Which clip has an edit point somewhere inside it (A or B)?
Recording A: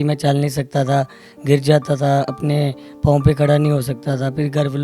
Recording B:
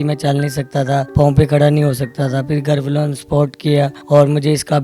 B